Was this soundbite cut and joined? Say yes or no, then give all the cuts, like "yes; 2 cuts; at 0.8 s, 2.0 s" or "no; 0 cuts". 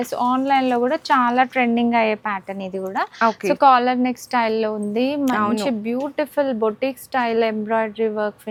no; 0 cuts